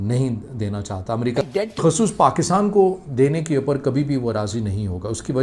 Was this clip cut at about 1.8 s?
yes; 1 cut; at 1.8 s

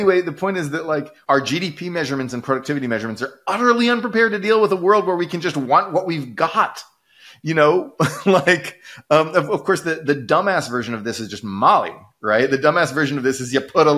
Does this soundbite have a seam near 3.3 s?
no; 1 cut; at 1.1 s

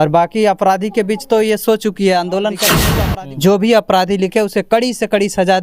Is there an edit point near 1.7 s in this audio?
no; 1 cut; at 2.9 s

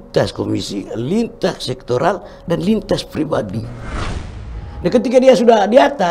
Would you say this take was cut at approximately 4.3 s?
yes; 1 cut; at 4.3 s

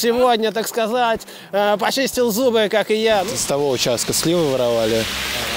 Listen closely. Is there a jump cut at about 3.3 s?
yes; 1 cut; at 3.3 s

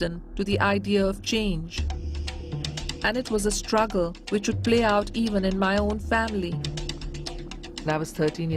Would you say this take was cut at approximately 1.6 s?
no; 1 cut; at 6.2 s

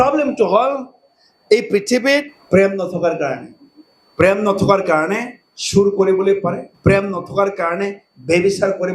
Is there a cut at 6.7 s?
yes; 2 cuts; at 2.4 s, 6.7 s

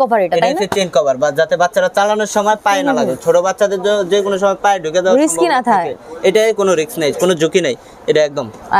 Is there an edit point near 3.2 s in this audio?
no; 0 cuts

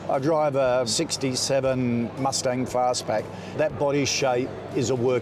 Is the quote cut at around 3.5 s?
no; 1 cut; at 0.9 s

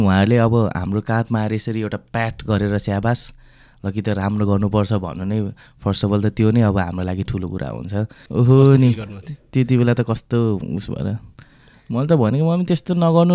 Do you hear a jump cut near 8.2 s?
yes; 1 cut; at 8.2 s

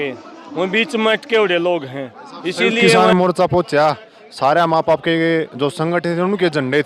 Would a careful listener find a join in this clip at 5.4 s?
no; 1 cut; at 3.0 s

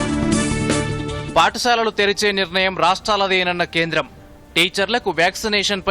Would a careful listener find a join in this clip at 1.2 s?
yes; 1 cut; at 1.2 s

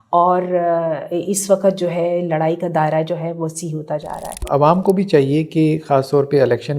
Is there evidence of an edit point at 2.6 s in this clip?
no; 1 cut; at 4.4 s

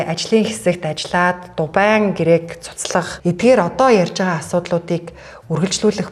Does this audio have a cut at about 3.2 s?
yes; 1 cut; at 3.2 s

